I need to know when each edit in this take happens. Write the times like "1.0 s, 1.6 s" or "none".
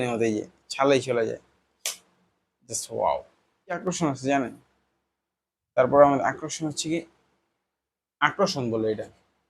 3.9 s